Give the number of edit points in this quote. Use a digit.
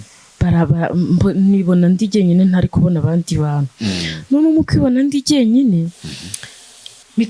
0